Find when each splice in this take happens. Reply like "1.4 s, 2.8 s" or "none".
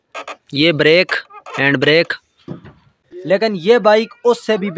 3.0 s